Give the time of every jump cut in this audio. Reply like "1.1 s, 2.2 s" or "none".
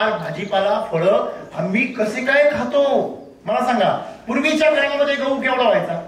3.3 s

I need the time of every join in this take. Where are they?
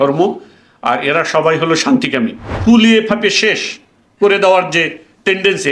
2.5 s

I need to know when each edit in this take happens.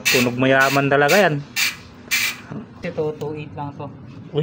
2.8 s

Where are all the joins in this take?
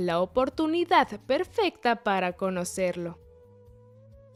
none

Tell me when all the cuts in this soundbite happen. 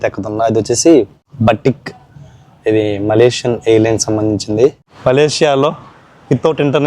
1.2 s, 4.9 s

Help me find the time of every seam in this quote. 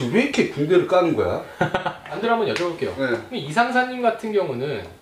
2.2 s

